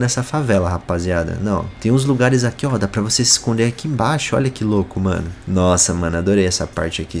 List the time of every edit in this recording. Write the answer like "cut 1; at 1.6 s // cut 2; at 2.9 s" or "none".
none

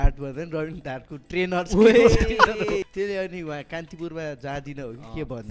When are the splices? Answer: cut 1; at 2.8 s

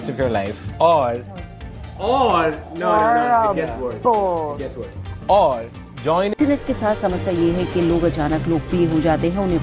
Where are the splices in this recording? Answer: cut 1; at 6.4 s

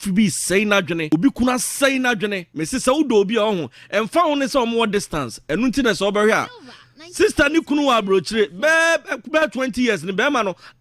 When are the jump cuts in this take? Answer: cut 1; at 1.1 s // cut 2; at 2.4 s

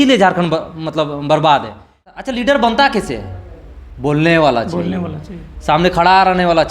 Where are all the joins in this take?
cut 1; at 2.2 s

